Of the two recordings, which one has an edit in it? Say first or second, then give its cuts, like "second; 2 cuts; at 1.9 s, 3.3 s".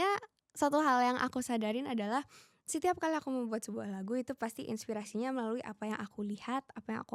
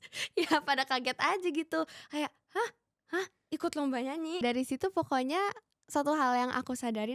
second; 1 cut; at 4.4 s